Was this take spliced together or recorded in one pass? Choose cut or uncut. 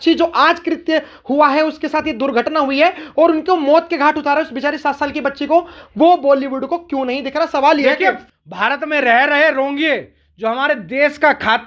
cut